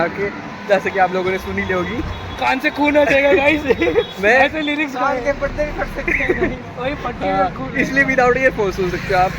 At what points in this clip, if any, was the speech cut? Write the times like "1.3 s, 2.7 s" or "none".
7.4 s